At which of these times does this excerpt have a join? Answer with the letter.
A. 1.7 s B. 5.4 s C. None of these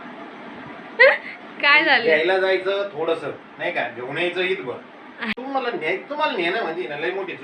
B